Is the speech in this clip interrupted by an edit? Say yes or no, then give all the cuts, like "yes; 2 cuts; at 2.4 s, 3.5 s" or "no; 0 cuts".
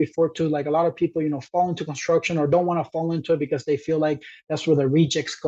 no; 0 cuts